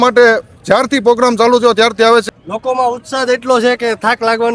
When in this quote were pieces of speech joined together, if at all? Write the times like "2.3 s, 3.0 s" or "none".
2.2 s